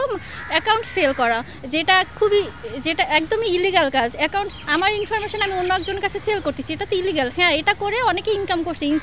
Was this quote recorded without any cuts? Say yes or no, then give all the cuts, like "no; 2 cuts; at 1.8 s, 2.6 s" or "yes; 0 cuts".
yes; 0 cuts